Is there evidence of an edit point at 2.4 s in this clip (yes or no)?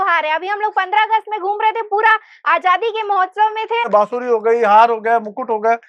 no